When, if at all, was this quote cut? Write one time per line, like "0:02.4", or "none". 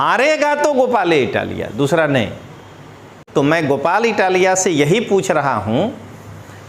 0:03.2